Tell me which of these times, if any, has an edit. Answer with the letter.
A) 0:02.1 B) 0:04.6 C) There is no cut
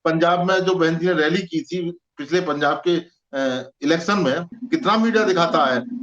B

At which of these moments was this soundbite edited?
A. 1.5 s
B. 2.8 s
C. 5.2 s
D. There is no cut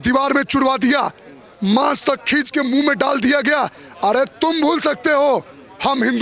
D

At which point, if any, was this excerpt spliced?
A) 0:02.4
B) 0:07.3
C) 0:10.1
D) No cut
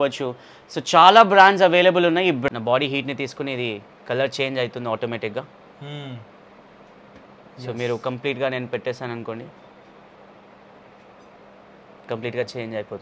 A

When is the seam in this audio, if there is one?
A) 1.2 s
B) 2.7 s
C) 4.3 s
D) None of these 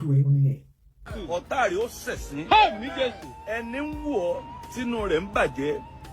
A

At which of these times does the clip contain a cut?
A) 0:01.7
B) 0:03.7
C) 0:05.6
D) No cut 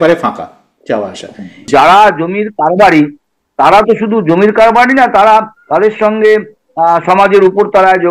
A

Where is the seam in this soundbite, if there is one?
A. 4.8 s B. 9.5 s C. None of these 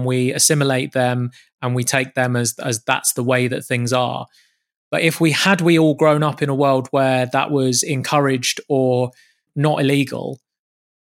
B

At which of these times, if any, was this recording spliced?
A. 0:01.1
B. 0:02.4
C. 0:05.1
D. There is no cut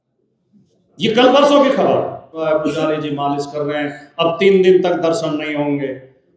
B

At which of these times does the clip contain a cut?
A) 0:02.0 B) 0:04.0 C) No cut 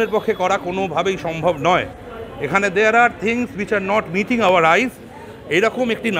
C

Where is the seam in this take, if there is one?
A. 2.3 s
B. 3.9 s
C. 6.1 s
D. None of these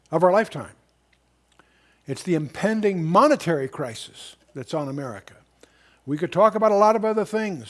C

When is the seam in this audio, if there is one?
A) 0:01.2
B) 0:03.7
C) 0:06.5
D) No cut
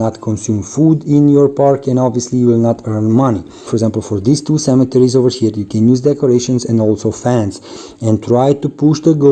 B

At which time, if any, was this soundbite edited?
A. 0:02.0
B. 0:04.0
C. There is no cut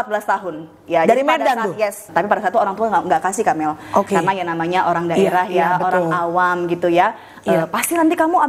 A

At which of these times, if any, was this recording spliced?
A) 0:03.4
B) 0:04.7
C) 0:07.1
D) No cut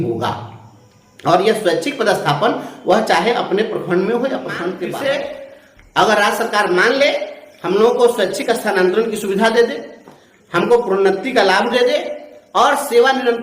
B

